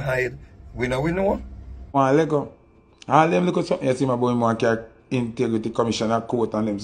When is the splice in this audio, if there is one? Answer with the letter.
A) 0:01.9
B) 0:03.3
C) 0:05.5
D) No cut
A